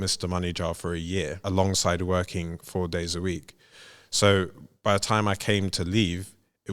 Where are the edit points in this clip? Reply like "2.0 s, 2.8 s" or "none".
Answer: 1.4 s